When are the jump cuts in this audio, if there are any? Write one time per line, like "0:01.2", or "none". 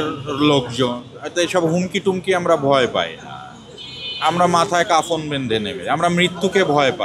none